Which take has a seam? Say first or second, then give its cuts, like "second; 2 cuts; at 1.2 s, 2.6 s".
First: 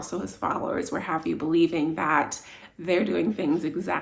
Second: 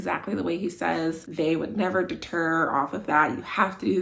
second; 1 cut; at 1.2 s